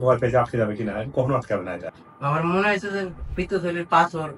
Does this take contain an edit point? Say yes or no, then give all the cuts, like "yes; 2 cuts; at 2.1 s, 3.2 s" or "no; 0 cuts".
yes; 1 cut; at 1.9 s